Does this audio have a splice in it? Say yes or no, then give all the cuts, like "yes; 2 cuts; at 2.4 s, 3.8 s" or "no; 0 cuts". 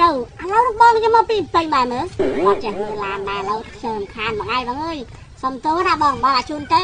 no; 0 cuts